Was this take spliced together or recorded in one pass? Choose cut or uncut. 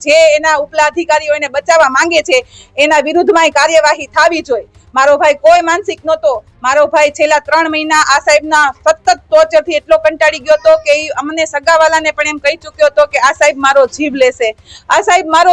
uncut